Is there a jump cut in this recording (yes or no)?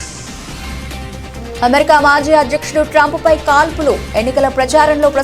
no